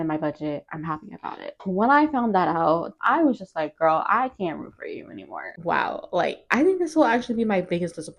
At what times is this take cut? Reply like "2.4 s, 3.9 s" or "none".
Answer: 1.5 s, 2.9 s, 5.5 s

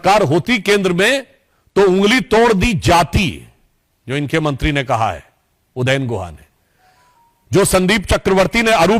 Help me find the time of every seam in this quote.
none

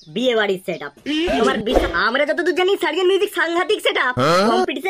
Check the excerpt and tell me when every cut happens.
1.8 s

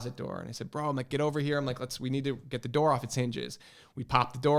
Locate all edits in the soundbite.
none

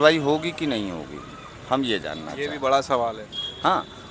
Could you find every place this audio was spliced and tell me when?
none

